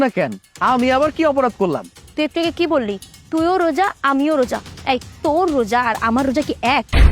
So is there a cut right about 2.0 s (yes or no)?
yes